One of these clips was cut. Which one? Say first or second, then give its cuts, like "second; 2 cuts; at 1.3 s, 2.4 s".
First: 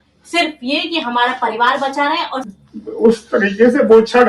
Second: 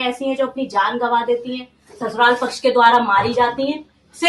first; 1 cut; at 2.5 s